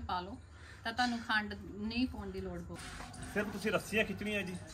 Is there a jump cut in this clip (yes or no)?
yes